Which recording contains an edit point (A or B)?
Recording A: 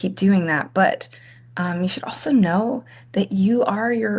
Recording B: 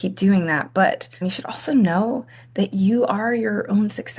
B